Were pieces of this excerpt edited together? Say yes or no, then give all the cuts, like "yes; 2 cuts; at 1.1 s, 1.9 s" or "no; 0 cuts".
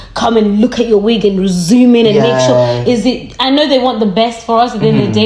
no; 0 cuts